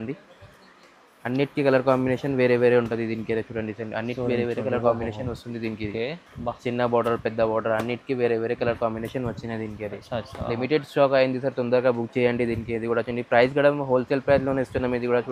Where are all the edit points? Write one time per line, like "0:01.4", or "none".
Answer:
none